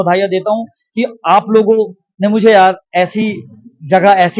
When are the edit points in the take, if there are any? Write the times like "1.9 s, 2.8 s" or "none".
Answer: none